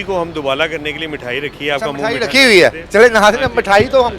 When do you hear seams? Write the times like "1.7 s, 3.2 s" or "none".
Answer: none